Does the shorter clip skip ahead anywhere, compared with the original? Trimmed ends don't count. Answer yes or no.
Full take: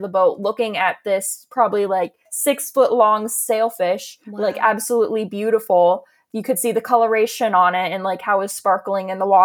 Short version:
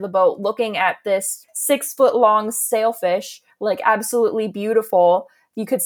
yes